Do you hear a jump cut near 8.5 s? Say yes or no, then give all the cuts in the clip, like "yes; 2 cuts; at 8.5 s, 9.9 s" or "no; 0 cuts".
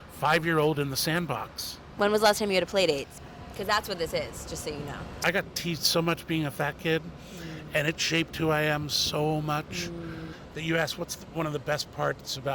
no; 4 cuts; at 1.9 s, 3.1 s, 5.2 s, 10.4 s